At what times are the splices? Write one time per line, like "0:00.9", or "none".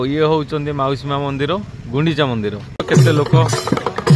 0:02.9

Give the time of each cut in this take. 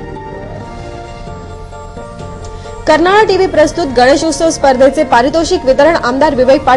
0:01.9

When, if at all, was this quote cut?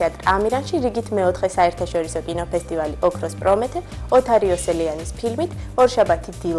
none

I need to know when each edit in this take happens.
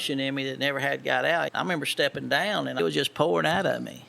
0:01.5
0:02.8

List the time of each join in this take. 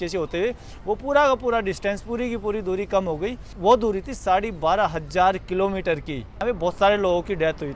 0:03.5
0:06.2

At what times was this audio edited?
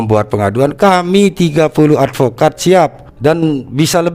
0:03.1

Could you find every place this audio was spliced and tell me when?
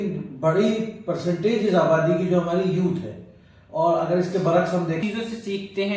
0:05.0

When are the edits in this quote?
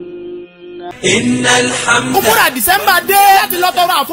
0:00.9

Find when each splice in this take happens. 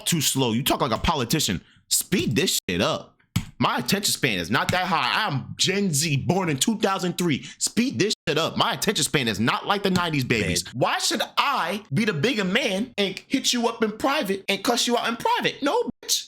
0:10.7
0:11.8
0:12.9
0:14.4

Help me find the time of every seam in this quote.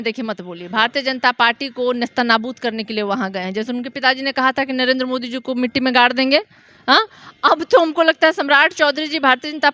none

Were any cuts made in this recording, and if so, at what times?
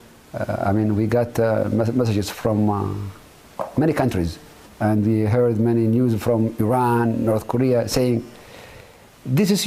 0:05.4

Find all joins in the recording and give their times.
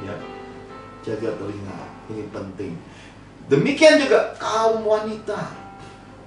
none

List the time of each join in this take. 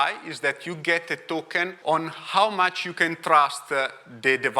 0:01.8

